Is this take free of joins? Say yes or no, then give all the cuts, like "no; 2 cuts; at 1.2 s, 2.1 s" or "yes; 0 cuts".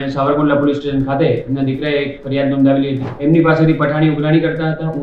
no; 1 cut; at 3.1 s